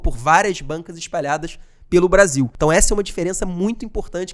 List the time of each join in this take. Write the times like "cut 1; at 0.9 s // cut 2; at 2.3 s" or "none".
cut 1; at 2.5 s